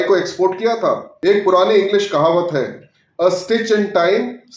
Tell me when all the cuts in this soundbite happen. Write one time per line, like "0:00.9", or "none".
0:01.1